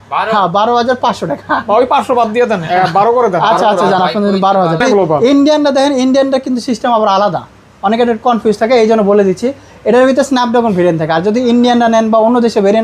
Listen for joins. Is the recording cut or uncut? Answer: cut